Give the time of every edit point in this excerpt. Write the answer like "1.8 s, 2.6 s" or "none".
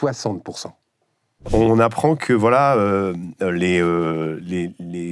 1.5 s